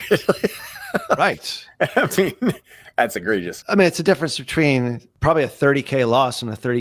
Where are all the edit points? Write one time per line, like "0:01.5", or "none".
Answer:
0:03.6
0:05.0